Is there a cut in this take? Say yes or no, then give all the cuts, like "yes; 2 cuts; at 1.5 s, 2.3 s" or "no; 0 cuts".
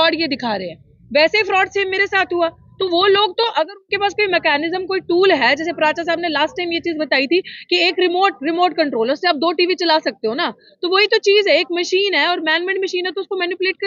no; 0 cuts